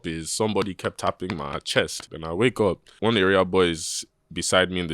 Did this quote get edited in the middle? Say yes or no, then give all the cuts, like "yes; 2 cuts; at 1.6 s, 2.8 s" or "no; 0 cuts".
yes; 2 cuts; at 2.1 s, 2.9 s